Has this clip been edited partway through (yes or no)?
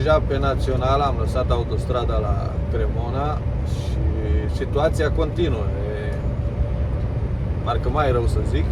no